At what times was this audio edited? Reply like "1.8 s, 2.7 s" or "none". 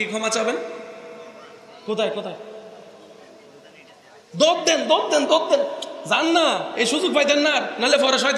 none